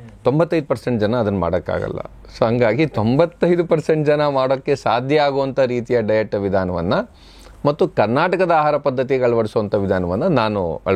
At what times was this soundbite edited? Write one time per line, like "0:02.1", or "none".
none